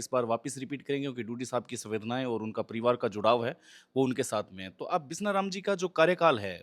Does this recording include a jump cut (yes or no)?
no